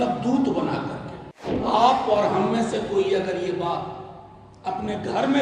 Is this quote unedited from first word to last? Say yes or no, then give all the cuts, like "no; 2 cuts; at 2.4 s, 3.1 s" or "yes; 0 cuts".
no; 1 cut; at 1.6 s